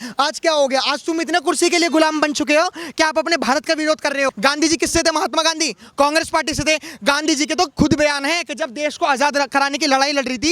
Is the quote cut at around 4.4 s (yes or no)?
yes